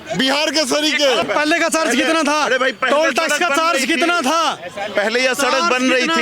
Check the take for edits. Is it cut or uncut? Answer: cut